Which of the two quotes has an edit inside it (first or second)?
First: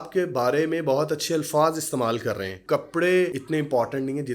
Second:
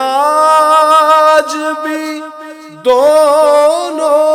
first